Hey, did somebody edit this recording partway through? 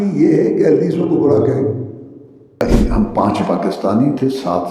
yes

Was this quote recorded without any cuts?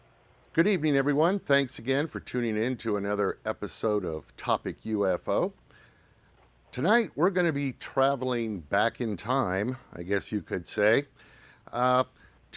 no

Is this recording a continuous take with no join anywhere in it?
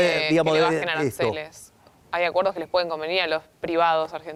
yes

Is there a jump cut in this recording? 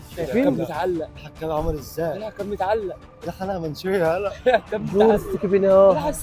no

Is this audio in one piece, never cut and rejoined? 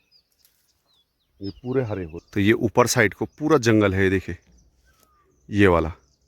no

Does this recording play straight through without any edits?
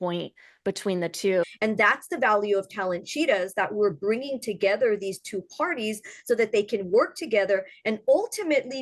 no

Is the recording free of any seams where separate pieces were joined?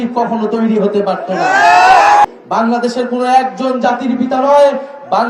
no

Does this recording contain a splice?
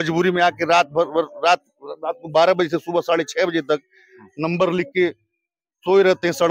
no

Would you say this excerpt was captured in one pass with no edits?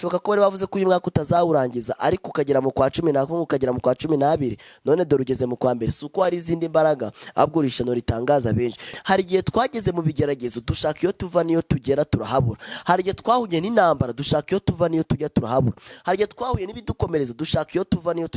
no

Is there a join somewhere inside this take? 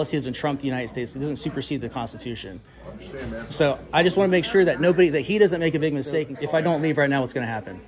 yes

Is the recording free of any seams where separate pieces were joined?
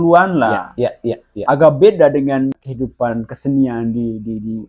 no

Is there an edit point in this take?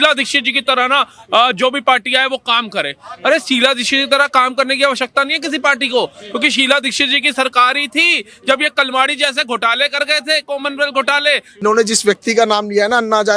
yes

